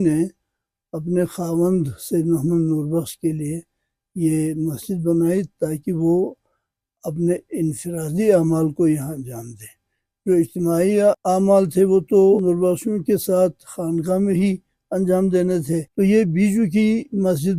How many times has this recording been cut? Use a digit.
0